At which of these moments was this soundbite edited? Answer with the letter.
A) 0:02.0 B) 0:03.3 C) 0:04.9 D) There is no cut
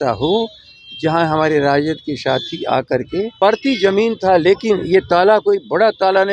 B